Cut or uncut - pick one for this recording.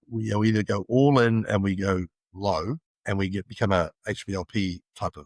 cut